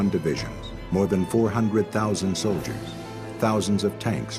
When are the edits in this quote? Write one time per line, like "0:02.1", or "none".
none